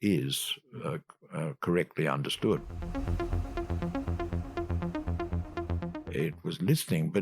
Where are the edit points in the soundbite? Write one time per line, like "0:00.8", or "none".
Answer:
0:02.9
0:05.9